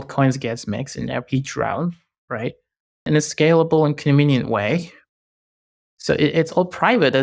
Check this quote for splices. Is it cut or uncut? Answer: uncut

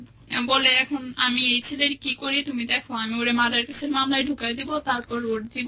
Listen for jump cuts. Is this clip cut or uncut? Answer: uncut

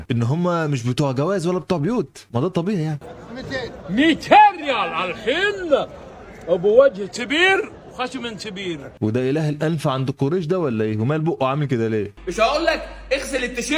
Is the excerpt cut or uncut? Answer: cut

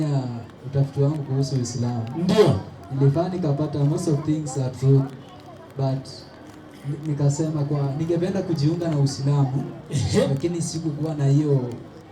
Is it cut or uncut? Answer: uncut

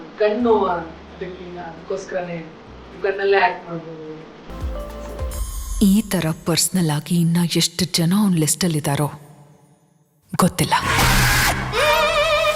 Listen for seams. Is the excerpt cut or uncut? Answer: uncut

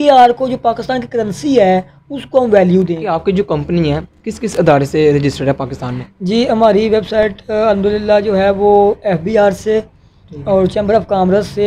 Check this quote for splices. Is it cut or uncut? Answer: cut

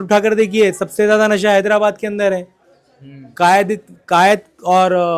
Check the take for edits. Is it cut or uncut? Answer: uncut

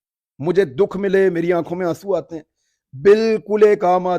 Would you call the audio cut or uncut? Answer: uncut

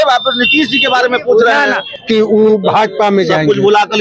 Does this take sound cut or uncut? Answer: cut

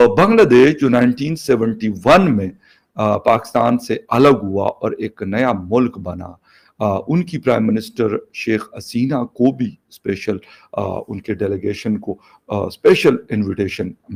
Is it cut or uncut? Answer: uncut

